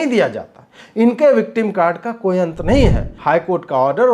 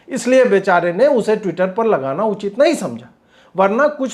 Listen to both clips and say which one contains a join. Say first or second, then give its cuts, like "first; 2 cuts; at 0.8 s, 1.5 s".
first; 1 cut; at 3.1 s